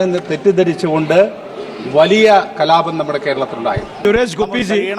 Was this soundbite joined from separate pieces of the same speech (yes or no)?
yes